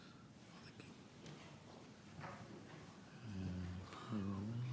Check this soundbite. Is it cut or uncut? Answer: cut